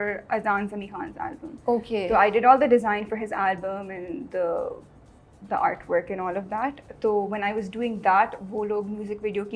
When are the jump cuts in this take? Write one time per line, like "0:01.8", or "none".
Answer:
none

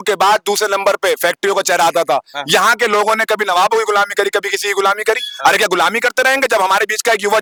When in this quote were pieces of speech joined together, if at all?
none

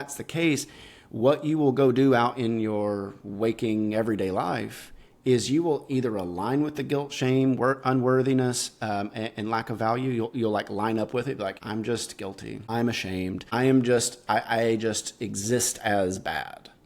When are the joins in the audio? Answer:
0:11.6
0:12.6

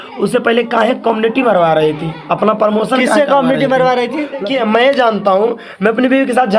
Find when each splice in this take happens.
0:04.4

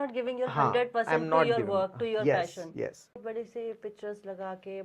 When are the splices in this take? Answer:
0:03.2

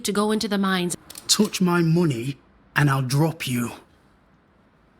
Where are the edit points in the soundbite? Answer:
0:00.9

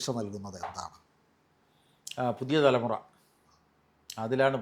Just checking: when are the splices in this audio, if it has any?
none

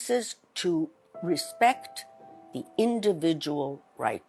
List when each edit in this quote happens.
0:01.1

